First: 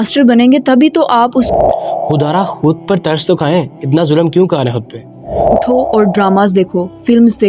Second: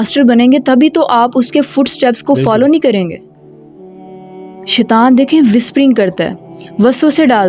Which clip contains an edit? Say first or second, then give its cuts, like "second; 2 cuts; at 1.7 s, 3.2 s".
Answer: first; 2 cuts; at 1.5 s, 5.6 s